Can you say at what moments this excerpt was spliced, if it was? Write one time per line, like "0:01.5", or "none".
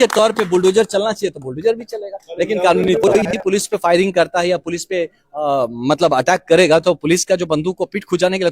0:03.3